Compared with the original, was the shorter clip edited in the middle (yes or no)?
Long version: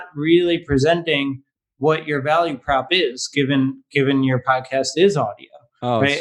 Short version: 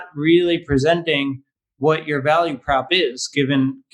no